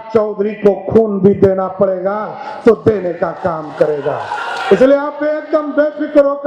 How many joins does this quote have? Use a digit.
0